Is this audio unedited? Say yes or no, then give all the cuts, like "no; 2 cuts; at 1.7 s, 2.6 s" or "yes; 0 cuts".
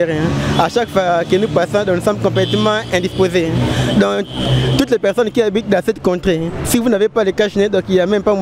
yes; 0 cuts